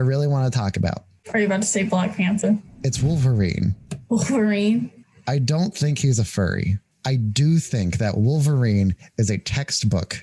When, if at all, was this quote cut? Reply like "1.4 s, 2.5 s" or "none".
1.1 s, 5.0 s, 6.9 s